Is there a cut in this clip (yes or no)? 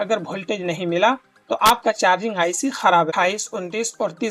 yes